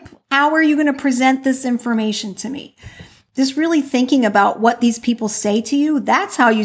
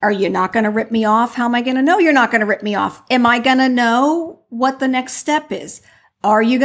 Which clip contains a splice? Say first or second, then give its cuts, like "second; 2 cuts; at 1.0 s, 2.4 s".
first; 1 cut; at 3.2 s